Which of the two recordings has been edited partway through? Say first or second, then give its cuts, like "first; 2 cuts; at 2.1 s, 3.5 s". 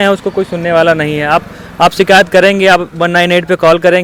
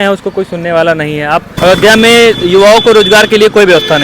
second; 1 cut; at 1.5 s